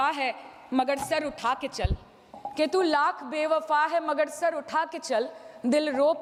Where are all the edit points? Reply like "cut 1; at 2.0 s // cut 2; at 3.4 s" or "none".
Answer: none